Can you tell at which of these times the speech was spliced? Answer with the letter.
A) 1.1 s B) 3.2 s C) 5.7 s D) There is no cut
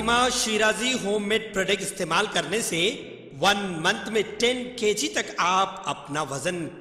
D